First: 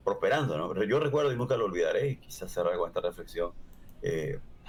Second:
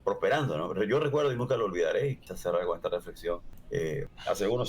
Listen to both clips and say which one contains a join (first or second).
second